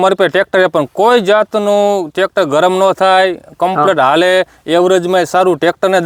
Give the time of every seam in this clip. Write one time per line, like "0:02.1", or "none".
none